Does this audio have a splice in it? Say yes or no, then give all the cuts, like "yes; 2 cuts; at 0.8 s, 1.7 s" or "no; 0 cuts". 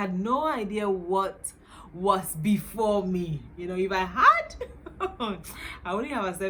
no; 0 cuts